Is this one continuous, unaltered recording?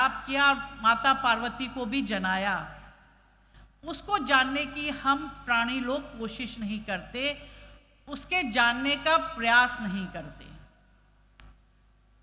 yes; 0 cuts

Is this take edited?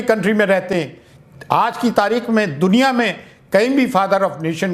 no; 0 cuts

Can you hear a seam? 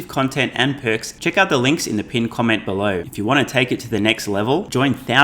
yes; 2 cuts; at 1.1 s, 3.1 s

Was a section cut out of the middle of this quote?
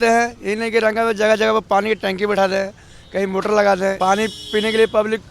yes; 1 cut; at 4.0 s

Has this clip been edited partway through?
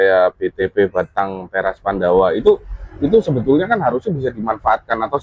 no; 0 cuts

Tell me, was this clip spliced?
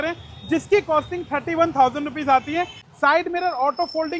yes; 1 cut; at 2.8 s

